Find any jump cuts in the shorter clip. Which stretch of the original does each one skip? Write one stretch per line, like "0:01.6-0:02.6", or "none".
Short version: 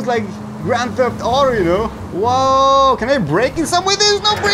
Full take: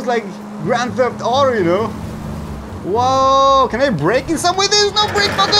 0:02.0-0:02.7